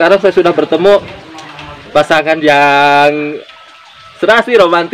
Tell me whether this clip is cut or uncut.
uncut